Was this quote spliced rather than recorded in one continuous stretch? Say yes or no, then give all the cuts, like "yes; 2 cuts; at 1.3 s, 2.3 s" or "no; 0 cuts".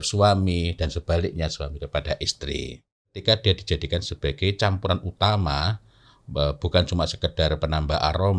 yes; 1 cut; at 3.2 s